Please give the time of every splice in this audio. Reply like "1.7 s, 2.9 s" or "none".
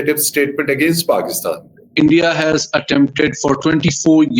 1.9 s